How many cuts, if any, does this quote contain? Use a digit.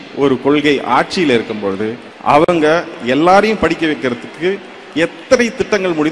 1